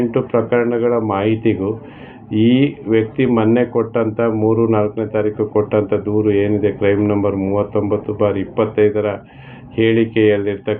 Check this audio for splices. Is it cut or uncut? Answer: uncut